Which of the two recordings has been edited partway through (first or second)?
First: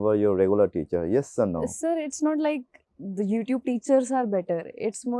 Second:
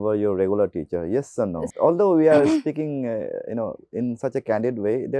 second